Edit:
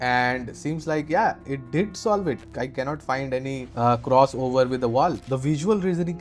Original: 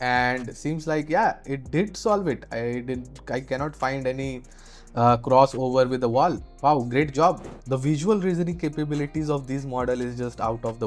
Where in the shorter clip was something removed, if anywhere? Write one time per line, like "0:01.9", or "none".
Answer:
0:02.4
0:03.7
0:05.3